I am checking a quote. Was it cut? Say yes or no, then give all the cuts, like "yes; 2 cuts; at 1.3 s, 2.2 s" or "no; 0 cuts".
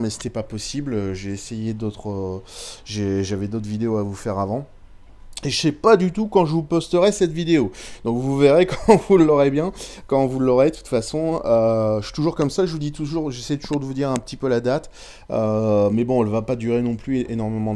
yes; 1 cut; at 14.2 s